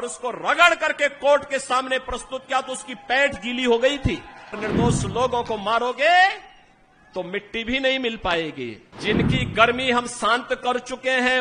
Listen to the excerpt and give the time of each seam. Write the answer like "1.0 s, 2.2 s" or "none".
4.6 s, 8.8 s